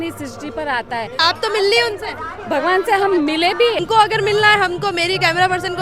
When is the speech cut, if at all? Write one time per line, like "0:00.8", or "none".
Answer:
0:01.2
0:03.8